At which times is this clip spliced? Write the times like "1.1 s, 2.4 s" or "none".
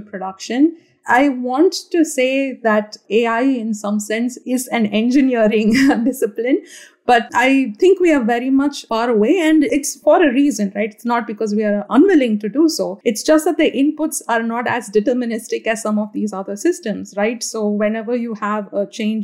4.4 s, 7.3 s, 8.8 s, 9.7 s, 12.9 s